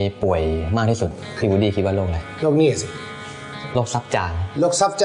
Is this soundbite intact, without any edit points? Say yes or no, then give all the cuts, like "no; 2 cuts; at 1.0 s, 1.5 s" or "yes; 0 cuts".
no; 1 cut; at 1.1 s